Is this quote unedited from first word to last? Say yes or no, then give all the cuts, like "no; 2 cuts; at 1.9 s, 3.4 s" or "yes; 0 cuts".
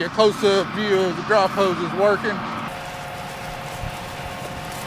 no; 1 cut; at 2.7 s